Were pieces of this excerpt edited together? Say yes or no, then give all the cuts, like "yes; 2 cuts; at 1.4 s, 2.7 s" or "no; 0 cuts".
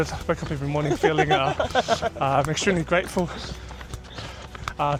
no; 0 cuts